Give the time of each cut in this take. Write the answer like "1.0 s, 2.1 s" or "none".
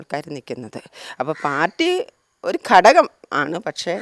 none